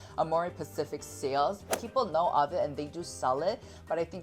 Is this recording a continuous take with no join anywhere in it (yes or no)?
no